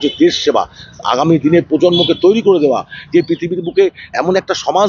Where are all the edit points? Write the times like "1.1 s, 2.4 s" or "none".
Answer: none